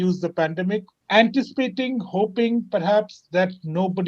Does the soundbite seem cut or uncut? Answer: cut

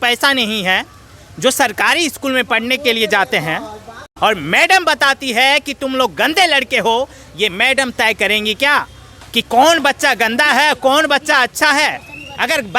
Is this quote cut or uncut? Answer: cut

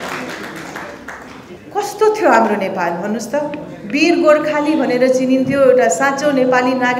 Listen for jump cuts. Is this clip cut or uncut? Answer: cut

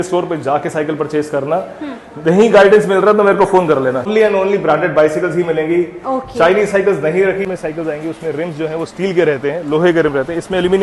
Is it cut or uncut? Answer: cut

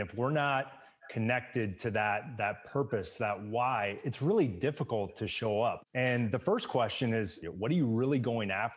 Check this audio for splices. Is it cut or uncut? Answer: cut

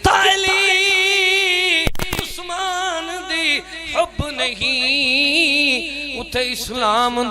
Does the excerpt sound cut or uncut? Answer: uncut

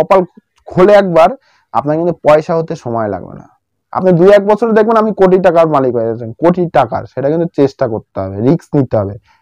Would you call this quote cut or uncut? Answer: uncut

